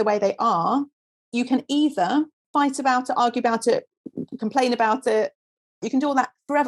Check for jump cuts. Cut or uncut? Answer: cut